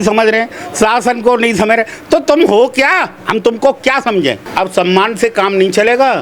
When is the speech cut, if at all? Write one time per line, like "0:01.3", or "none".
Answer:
0:04.4

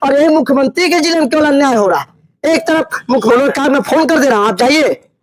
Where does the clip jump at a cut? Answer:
0:03.3

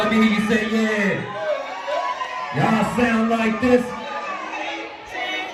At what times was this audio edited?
none

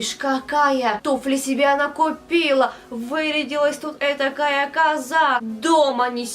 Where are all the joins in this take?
0:01.0
0:05.5

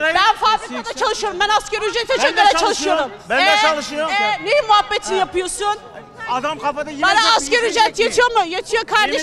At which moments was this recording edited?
none

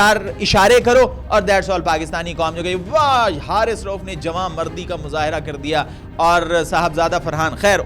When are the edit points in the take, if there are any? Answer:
none

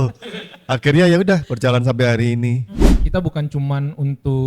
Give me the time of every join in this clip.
0:02.9

